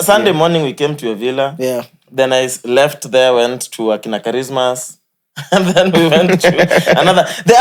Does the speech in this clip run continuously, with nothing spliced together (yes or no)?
yes